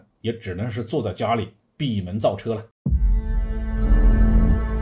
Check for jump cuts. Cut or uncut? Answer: cut